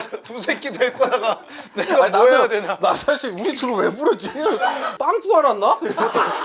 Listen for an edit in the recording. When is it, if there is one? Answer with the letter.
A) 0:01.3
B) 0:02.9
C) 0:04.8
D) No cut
C